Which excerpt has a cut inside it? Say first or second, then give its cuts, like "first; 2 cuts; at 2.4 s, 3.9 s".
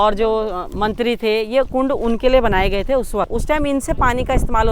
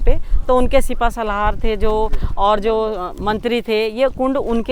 first; 1 cut; at 3.3 s